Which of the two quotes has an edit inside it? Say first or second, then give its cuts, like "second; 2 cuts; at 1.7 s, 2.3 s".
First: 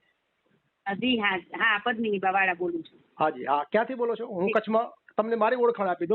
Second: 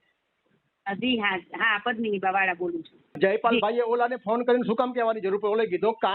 second; 1 cut; at 3.0 s